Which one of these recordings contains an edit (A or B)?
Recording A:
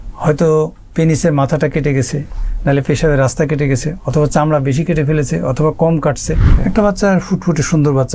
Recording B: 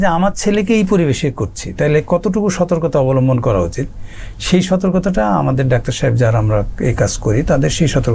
A